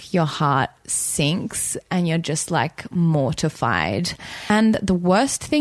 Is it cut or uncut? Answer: cut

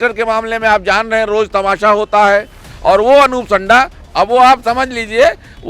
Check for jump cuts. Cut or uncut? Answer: uncut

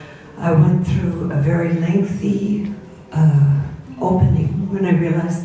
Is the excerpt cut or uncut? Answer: cut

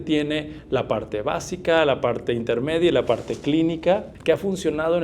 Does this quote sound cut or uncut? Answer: cut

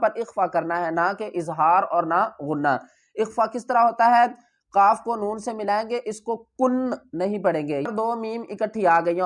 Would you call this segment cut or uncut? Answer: cut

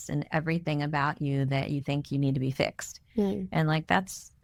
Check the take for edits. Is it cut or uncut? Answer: uncut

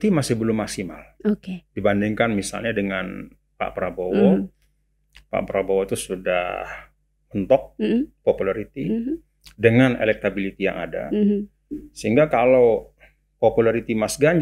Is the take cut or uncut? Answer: uncut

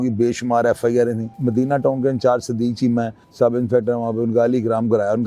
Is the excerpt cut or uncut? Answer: cut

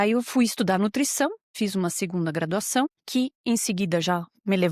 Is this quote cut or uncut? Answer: cut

